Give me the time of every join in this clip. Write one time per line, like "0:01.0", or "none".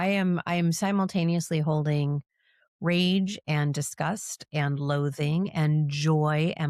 none